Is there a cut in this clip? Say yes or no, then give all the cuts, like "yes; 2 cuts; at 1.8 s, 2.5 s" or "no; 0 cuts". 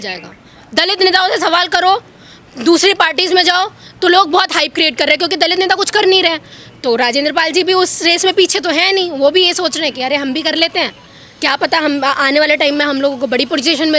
no; 0 cuts